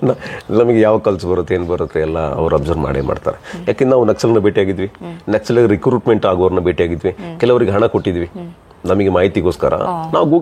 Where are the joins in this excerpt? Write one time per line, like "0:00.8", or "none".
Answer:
none